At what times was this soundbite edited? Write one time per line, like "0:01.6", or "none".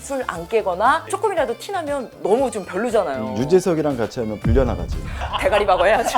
0:05.3